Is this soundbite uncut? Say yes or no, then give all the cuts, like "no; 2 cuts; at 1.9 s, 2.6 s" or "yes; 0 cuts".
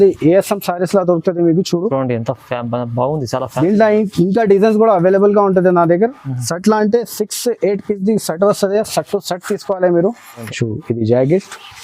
no; 1 cut; at 10.4 s